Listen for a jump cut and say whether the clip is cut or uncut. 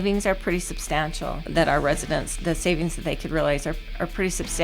cut